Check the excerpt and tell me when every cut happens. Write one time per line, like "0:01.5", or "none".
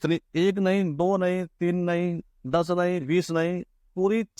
none